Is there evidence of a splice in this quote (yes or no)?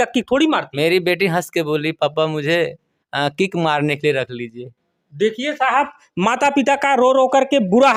no